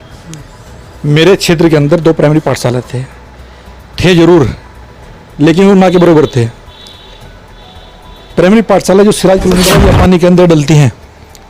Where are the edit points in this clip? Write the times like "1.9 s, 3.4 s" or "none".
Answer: 9.7 s